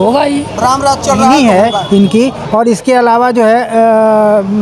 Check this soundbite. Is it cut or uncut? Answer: cut